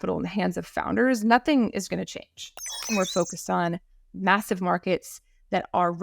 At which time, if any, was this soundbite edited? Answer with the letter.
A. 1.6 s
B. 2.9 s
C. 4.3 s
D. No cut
B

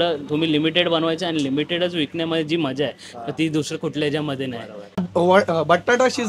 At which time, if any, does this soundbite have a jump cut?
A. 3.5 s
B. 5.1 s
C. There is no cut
B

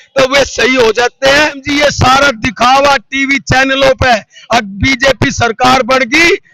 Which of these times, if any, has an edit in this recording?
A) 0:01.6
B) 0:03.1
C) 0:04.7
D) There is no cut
A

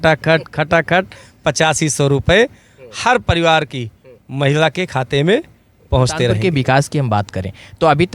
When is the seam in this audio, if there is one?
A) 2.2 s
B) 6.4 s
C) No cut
B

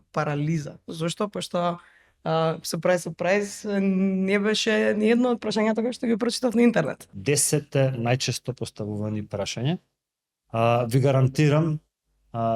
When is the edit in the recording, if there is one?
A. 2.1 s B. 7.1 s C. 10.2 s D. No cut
B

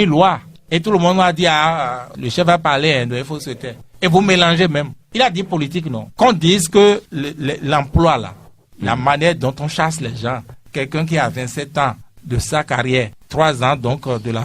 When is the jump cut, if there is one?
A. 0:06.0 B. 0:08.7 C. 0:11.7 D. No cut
A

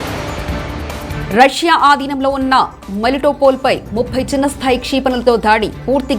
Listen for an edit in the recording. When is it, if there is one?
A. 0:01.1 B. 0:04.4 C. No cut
A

